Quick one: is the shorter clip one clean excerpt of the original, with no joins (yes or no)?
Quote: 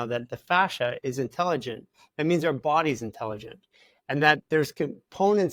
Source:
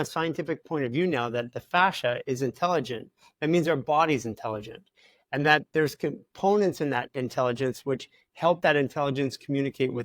yes